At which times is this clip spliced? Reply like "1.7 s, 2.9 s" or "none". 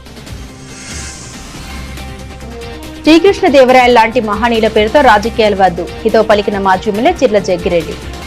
none